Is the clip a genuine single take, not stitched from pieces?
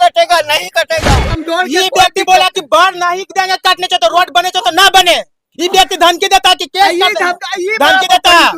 no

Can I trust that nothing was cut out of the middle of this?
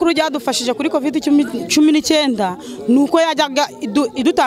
yes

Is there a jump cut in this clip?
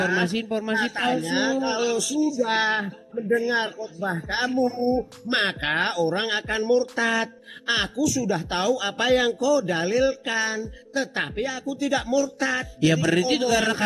no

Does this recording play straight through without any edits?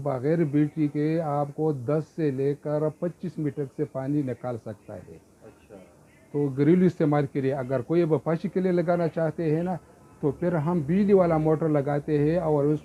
yes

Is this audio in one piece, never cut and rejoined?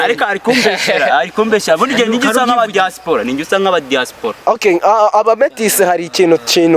yes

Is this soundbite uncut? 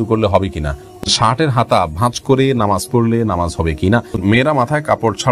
no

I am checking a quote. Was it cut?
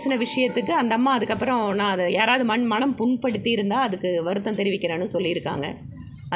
no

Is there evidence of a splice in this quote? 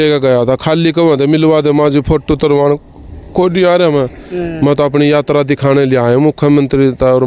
no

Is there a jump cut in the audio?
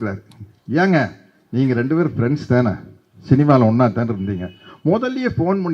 no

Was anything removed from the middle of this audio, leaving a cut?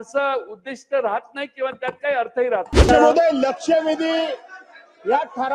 yes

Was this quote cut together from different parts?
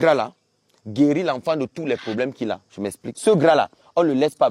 yes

